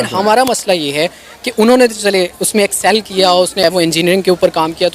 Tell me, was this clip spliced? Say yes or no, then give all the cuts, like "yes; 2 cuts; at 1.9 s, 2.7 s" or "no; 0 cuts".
no; 0 cuts